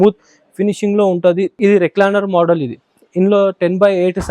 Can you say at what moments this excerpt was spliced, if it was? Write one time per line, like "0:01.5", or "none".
0:01.5